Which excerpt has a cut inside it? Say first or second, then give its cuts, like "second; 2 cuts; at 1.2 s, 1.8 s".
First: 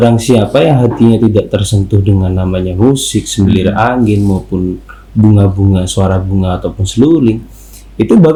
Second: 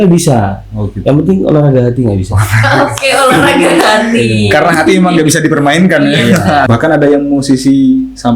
second; 1 cut; at 6.7 s